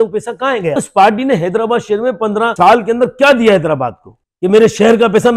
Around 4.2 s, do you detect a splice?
yes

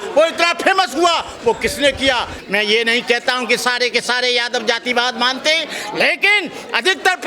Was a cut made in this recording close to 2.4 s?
yes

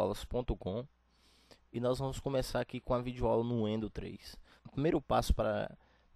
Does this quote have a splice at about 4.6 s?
yes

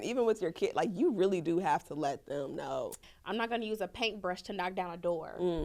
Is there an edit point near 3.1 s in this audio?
yes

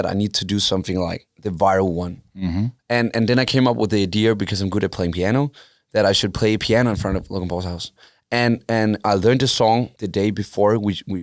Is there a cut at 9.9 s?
yes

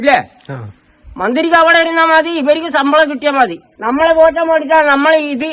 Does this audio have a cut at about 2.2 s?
no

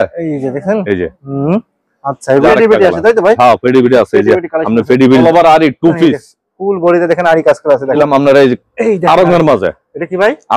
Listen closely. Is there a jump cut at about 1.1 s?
no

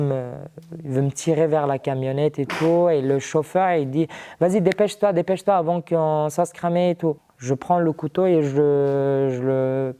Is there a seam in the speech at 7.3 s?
yes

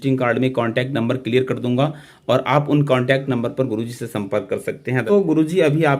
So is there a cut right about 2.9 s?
no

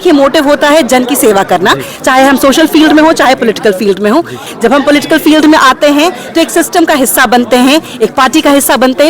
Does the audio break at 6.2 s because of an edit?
no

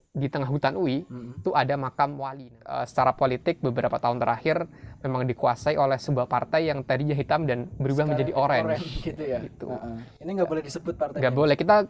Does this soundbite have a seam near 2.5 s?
yes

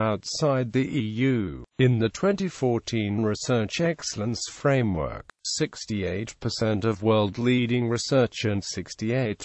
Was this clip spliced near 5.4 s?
yes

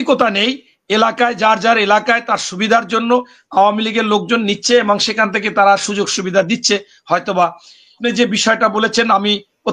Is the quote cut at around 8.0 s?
yes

